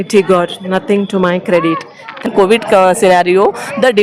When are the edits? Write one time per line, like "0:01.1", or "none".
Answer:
0:02.3